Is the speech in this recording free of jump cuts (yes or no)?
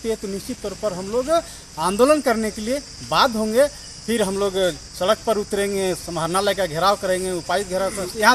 yes